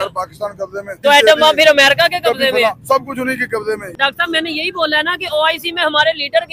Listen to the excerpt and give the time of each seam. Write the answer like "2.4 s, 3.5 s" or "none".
0.9 s, 4.0 s